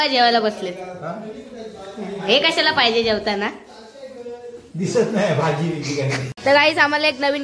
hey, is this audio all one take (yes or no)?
no